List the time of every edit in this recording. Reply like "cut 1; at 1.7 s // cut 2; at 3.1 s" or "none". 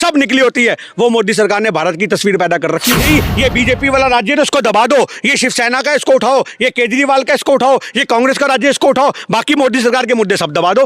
cut 1; at 2.9 s